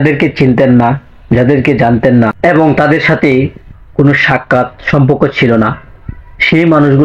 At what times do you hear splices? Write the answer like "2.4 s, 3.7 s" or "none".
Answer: none